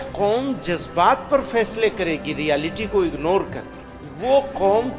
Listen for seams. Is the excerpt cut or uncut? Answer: uncut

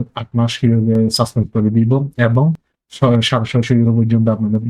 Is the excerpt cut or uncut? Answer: uncut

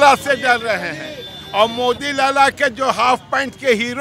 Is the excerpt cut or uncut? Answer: uncut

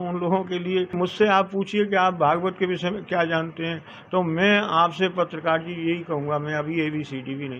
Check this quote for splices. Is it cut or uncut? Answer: cut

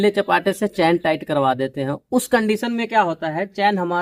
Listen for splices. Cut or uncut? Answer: uncut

